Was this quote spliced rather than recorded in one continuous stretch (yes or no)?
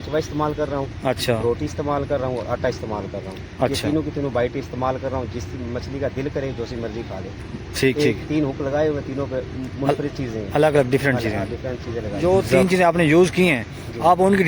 yes